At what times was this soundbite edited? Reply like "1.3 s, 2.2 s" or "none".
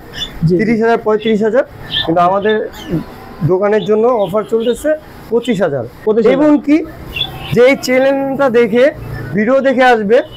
none

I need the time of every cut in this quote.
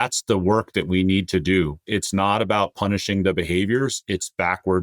1.8 s

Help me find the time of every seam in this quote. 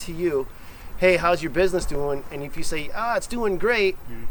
none

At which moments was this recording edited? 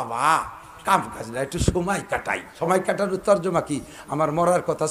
2.4 s

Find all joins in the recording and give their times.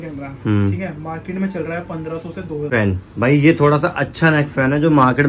2.7 s

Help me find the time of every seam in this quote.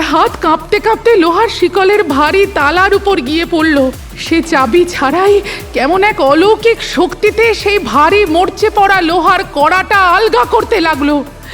4.1 s

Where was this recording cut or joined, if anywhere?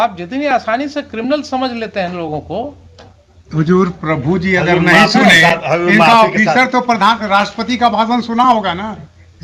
none

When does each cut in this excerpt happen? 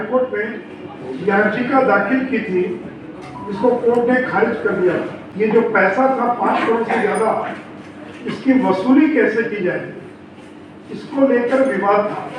5.2 s

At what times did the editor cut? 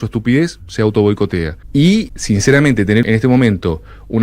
1.6 s, 2.2 s, 3.0 s

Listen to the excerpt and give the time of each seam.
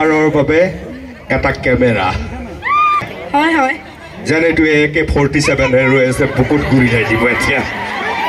3.1 s

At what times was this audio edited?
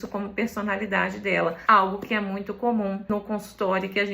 1.6 s, 3.0 s

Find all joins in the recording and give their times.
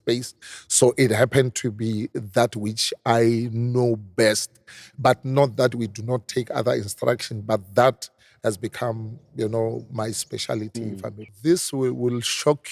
11.3 s

